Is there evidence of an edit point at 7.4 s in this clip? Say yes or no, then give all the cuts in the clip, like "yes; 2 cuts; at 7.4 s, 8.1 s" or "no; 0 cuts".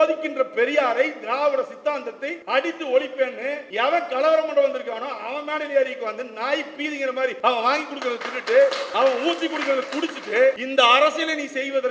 yes; 5 cuts; at 2.3 s, 3.6 s, 7.4 s, 8.8 s, 10.6 s